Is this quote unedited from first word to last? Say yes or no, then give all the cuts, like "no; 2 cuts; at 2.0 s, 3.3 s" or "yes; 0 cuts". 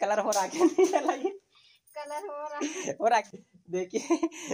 no; 1 cut; at 3.3 s